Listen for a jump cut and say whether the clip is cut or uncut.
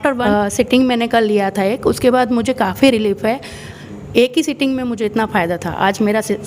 cut